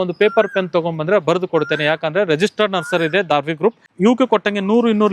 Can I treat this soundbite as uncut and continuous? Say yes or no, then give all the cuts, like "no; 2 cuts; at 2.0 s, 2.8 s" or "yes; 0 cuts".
no; 1 cut; at 3.9 s